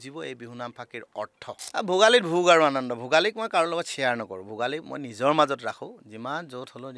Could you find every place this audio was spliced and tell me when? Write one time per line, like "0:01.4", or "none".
0:01.6